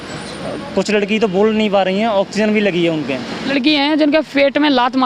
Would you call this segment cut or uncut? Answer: cut